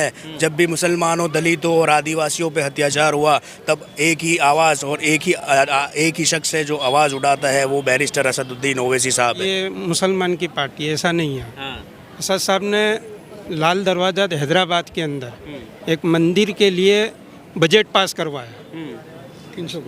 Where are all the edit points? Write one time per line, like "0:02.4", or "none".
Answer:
0:09.4